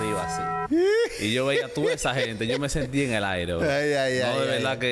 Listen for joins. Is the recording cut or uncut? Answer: uncut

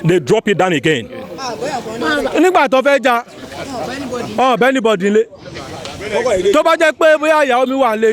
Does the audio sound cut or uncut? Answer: cut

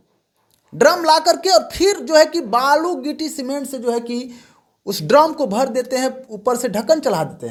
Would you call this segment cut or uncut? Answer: uncut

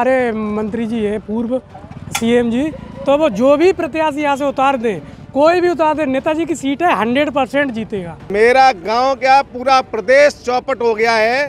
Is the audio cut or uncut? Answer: cut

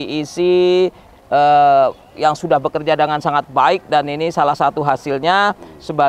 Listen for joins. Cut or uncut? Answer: uncut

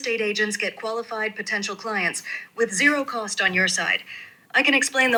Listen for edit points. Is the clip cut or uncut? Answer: uncut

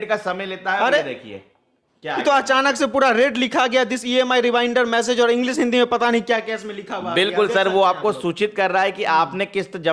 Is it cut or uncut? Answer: uncut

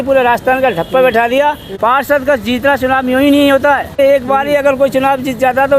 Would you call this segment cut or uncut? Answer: cut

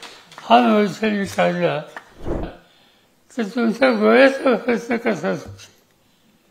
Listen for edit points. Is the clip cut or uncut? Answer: cut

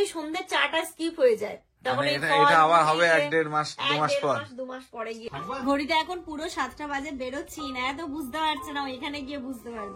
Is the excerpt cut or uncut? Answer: cut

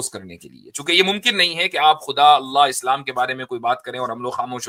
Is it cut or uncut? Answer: uncut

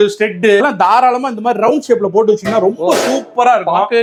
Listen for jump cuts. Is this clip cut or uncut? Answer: uncut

